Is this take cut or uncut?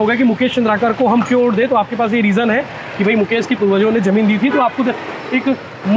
uncut